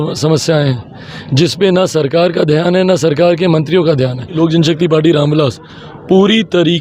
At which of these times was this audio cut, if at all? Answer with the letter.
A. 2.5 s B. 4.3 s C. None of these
B